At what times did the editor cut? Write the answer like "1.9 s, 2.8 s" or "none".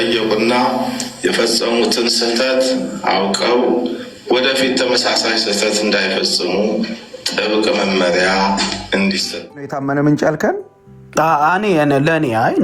9.7 s